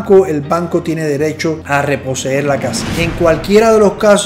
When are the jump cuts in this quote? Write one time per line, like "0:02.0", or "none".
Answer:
0:01.6
0:02.8